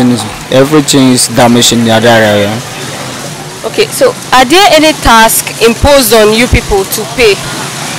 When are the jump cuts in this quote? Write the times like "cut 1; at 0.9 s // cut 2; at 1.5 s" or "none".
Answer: none